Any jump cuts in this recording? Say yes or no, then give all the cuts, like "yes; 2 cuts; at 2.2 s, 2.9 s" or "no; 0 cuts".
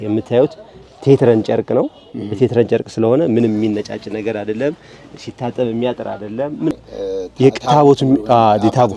yes; 1 cut; at 6.7 s